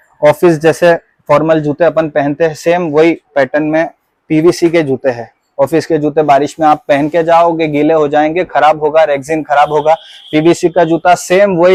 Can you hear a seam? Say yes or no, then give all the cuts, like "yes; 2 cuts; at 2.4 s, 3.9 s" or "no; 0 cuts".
no; 0 cuts